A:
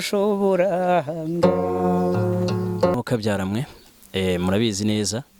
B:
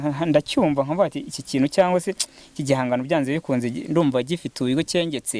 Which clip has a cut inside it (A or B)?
A